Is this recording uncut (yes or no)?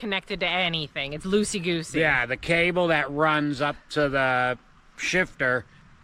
yes